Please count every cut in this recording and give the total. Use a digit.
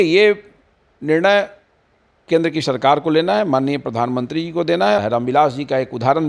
1